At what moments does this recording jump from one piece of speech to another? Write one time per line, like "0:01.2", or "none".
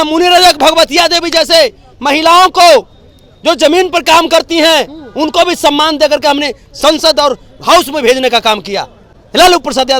none

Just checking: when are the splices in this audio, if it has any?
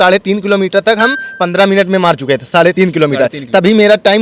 none

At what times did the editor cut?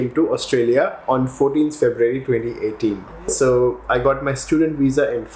0:03.3

